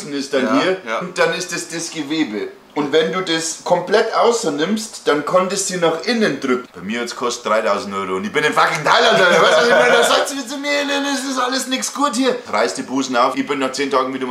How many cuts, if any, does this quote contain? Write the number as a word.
four